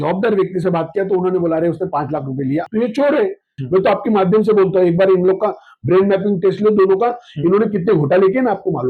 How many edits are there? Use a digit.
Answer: 2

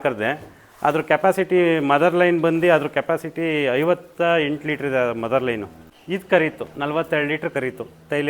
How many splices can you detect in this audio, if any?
0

